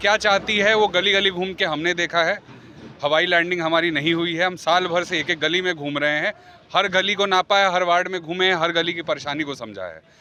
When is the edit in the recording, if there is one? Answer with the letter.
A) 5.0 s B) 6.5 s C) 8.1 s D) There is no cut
D